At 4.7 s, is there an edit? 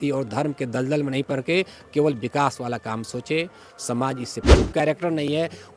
yes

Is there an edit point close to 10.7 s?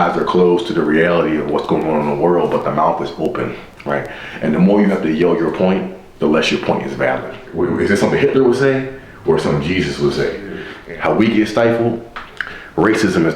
yes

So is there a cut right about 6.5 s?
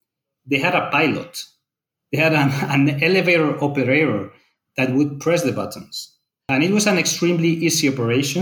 yes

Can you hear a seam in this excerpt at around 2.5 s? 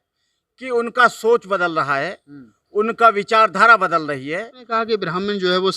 no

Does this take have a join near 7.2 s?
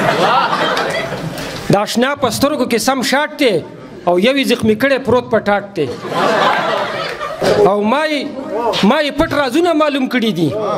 yes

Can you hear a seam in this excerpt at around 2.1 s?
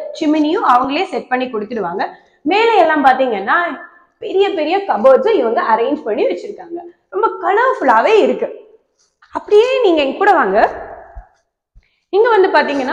no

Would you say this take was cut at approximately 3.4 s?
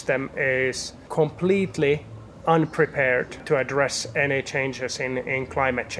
yes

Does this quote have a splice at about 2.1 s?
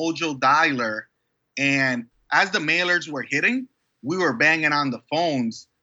yes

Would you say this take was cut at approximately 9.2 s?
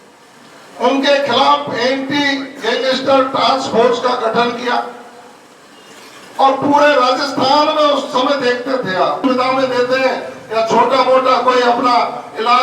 yes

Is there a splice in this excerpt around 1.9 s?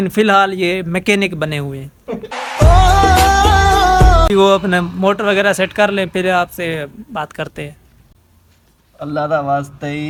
no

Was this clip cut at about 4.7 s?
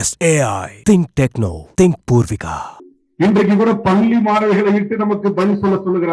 no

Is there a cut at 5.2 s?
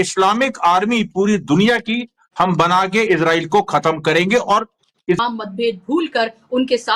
yes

